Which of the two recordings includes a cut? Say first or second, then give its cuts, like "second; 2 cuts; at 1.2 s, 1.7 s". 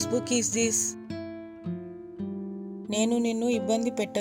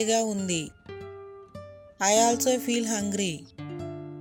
first; 2 cuts; at 1.0 s, 2.8 s